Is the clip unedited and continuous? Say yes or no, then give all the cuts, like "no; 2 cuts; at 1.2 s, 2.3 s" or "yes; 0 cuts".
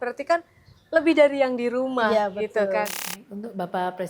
no; 1 cut; at 3.1 s